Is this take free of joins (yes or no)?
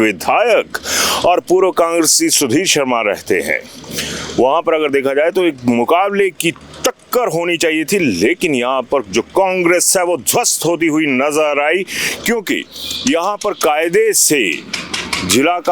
yes